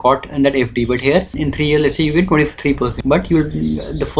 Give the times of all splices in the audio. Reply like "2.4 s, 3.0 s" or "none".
1.4 s, 3.0 s